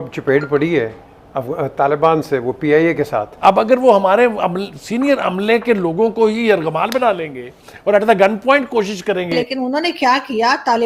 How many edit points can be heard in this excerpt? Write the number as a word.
two